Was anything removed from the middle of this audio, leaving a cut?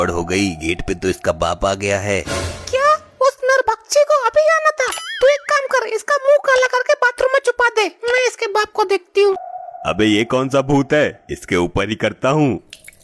yes; 1 cut; at 9.5 s

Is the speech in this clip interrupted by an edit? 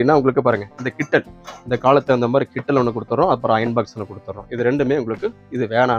no; 0 cuts

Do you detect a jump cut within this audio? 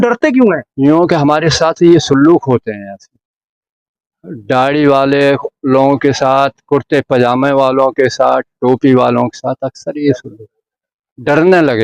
no; 0 cuts

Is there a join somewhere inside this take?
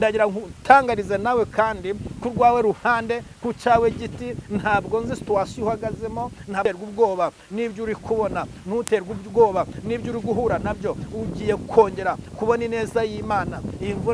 yes; 1 cut; at 6.6 s

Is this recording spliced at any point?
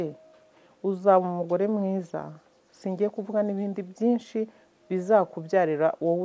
no; 0 cuts

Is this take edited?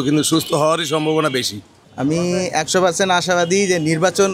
yes; 1 cut; at 1.8 s

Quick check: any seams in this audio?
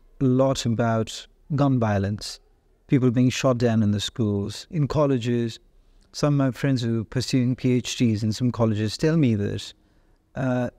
no; 0 cuts

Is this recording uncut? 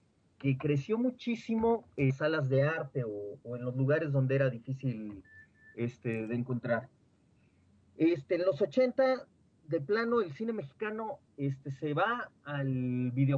yes; 0 cuts

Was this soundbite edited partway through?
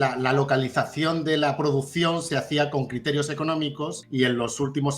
yes; 1 cut; at 4.0 s

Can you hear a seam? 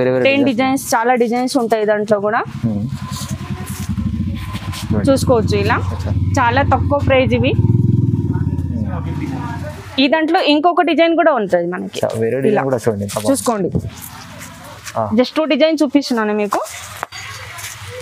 no; 0 cuts

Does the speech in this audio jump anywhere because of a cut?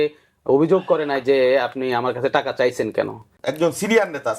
yes; 1 cut; at 3.4 s

